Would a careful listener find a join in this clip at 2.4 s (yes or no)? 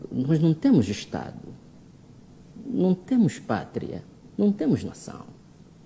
no